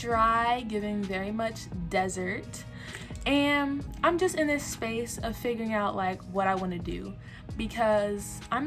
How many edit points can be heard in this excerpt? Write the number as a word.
zero